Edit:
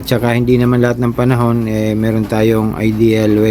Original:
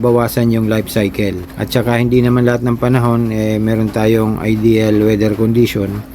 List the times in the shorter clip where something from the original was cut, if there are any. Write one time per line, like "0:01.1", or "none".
none